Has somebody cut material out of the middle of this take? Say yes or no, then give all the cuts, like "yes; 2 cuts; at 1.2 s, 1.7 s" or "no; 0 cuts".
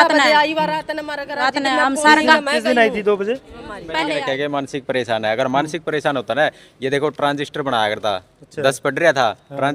yes; 1 cut; at 3.8 s